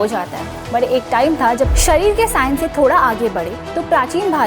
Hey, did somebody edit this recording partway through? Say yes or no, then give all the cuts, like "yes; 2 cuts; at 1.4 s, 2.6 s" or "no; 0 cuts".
yes; 1 cut; at 1.8 s